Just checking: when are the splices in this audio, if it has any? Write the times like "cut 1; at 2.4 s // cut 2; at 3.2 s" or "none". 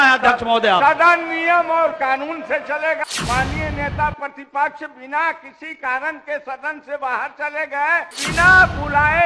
cut 1; at 3.0 s // cut 2; at 8.2 s

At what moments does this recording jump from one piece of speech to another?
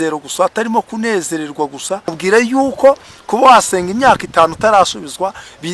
cut 1; at 2.2 s

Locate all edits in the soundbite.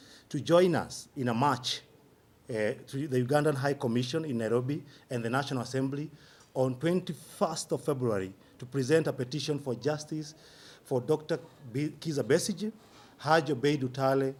none

